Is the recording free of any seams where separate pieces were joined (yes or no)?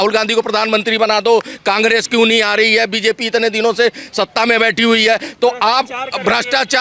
yes